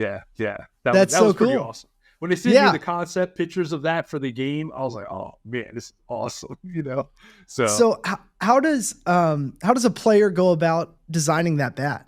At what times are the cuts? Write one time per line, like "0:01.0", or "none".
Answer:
none